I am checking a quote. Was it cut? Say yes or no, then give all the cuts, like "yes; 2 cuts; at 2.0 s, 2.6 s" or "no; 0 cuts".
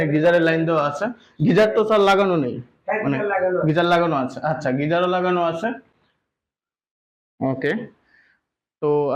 no; 0 cuts